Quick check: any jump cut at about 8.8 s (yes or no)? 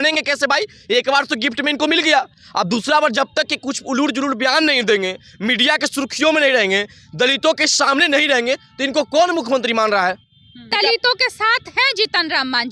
no